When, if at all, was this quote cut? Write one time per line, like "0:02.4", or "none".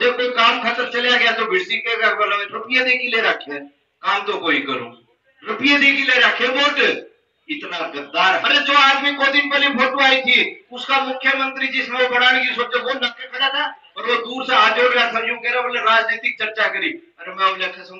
0:08.4